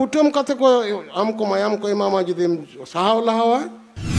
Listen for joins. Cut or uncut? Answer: uncut